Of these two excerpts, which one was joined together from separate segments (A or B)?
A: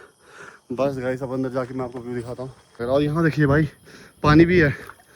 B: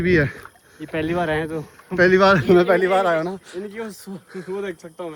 A